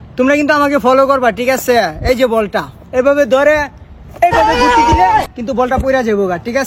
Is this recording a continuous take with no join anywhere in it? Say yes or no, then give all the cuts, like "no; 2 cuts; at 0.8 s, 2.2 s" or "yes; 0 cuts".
yes; 0 cuts